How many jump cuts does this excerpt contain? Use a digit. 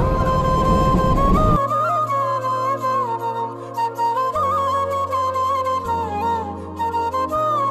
0